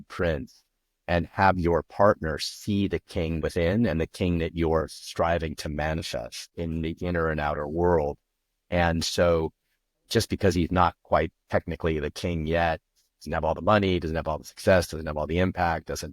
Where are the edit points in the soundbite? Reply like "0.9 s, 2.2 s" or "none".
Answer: 3.4 s, 6.5 s

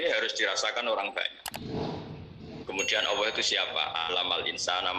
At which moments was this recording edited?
2.5 s

